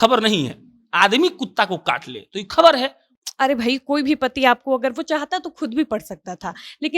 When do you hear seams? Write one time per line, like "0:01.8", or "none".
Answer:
0:03.1

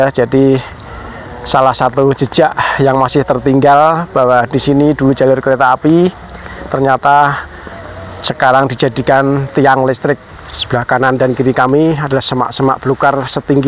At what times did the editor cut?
0:10.3

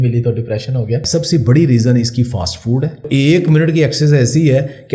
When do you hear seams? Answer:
0:01.0
0:03.0

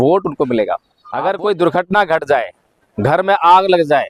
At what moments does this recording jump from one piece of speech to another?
0:01.0

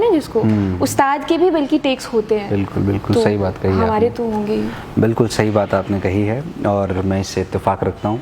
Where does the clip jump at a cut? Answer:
none

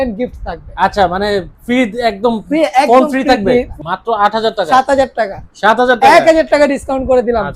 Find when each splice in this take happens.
0:03.7

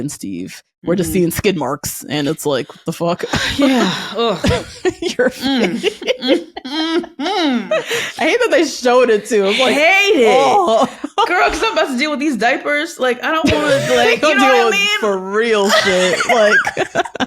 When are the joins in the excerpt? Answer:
0:04.4

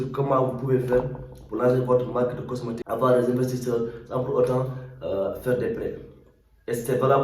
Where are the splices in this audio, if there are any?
0:02.8

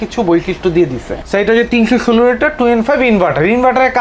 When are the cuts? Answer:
0:01.2

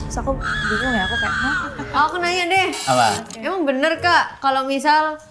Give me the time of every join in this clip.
0:01.8

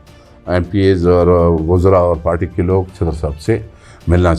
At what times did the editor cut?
none

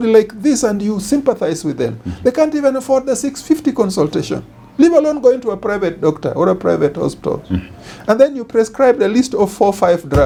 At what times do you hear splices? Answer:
none

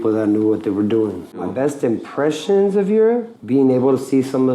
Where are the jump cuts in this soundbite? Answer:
0:01.4
0:03.4

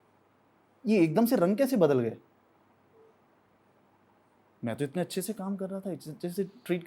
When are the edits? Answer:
none

